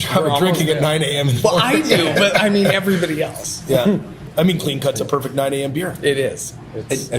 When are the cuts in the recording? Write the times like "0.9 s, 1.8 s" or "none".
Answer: 4.2 s